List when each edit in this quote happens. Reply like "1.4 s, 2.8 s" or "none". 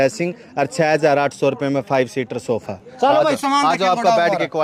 none